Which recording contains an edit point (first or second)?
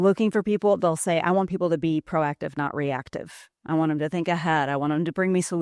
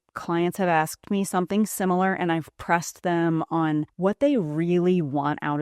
second